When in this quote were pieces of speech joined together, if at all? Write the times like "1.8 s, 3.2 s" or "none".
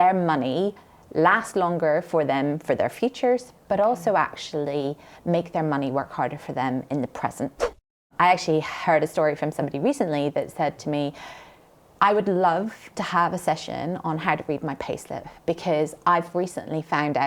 8.1 s